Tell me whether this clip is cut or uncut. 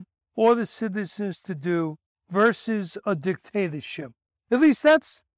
uncut